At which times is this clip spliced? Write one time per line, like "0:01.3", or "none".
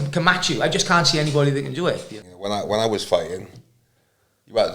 0:02.1